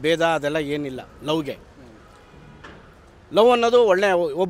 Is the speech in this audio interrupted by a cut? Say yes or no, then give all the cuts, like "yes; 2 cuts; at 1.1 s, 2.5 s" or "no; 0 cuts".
no; 0 cuts